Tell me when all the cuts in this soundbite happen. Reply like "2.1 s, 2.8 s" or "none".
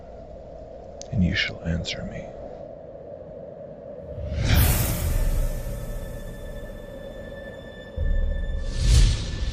none

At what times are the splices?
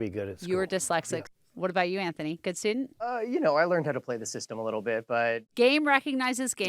1.3 s, 3.1 s, 5.5 s

